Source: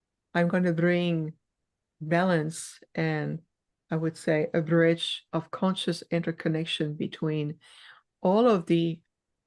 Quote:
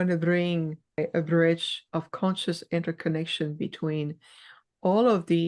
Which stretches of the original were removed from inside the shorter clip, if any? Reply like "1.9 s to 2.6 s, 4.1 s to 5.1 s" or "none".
1.5 s to 4.4 s